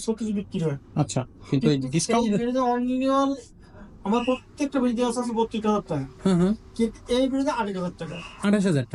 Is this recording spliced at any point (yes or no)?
no